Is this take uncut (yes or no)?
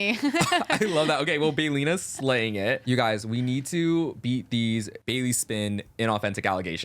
no